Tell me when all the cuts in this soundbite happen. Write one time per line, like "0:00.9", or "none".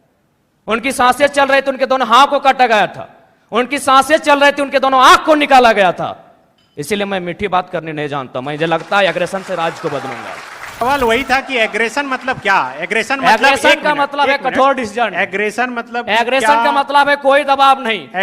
0:10.8